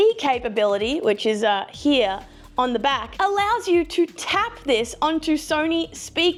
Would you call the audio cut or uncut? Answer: uncut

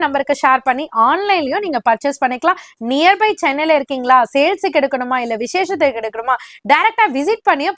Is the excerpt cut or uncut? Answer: uncut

